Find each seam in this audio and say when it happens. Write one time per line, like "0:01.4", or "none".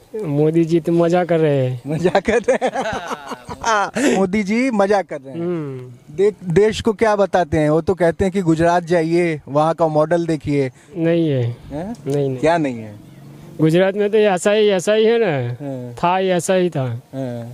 none